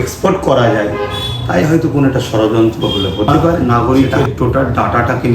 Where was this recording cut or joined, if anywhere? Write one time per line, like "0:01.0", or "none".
0:03.6